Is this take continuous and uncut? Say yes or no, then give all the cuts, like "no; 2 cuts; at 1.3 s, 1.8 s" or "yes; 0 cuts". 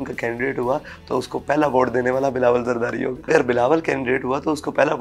no; 1 cut; at 3.3 s